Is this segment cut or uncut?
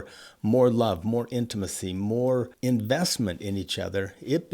cut